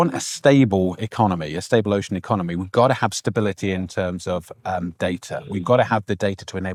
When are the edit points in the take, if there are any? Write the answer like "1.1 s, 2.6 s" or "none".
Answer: none